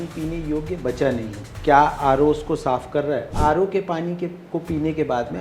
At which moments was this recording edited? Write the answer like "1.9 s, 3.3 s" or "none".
1.5 s, 3.3 s